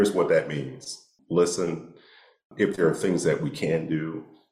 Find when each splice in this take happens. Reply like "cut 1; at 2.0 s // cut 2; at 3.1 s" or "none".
cut 1; at 1.1 s